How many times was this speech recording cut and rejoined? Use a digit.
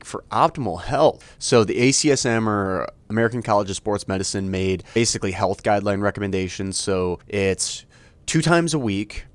3